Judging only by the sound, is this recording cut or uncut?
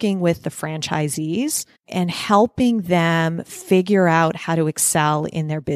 cut